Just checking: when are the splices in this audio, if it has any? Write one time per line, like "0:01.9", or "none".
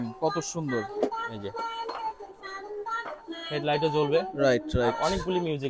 none

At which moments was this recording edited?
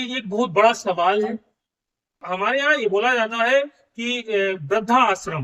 0:02.2

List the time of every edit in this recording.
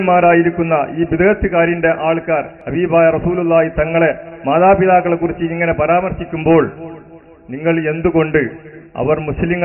0:02.6

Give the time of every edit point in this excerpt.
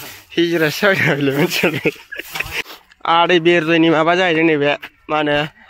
0:02.5

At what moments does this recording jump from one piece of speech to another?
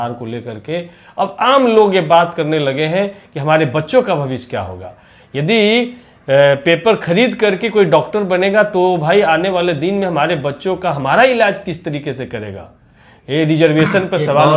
none

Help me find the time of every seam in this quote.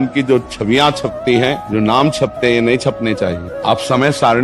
0:01.6
0:03.5

